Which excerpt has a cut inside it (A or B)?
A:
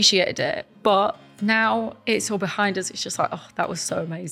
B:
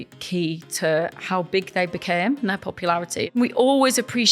B